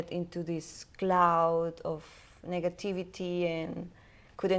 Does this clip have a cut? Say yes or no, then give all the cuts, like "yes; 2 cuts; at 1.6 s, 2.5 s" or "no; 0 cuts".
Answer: no; 0 cuts